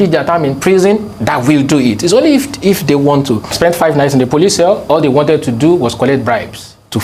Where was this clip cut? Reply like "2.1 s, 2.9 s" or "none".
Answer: 3.5 s